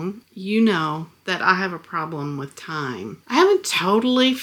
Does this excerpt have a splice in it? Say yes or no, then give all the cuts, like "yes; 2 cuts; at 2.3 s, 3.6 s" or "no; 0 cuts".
no; 0 cuts